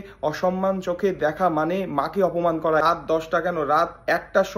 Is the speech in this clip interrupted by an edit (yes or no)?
yes